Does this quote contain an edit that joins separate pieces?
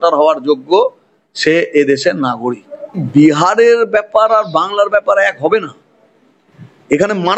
yes; 1 cut; at 3.0 s

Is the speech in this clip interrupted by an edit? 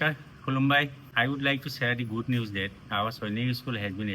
yes; 1 cut; at 1.0 s

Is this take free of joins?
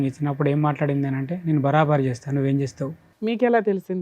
no; 1 cut; at 3.0 s

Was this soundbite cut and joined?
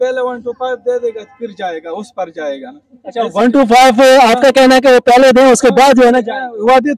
no; 0 cuts

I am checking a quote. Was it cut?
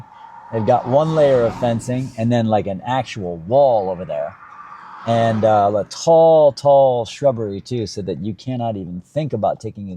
no; 0 cuts

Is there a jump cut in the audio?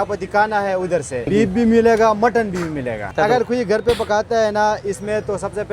yes; 2 cuts; at 1.3 s, 3.1 s

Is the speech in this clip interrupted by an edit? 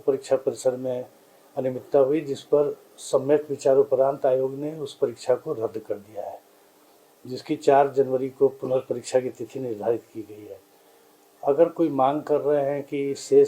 no; 0 cuts

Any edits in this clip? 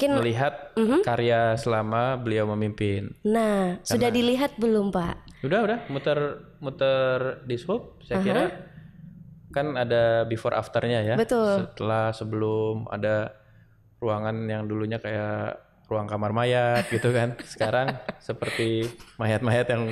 no; 0 cuts

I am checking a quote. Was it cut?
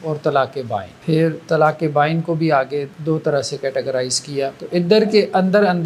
yes; 3 cuts; at 0.9 s, 2.9 s, 4.6 s

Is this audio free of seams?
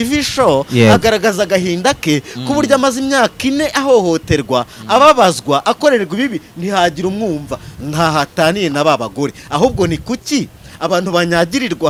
yes; 0 cuts

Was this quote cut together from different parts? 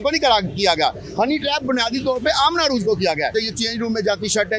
yes; 1 cut; at 3.3 s

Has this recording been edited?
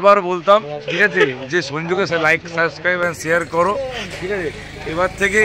no; 0 cuts

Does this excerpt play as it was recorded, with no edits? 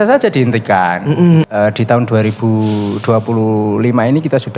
no; 1 cut; at 1.5 s

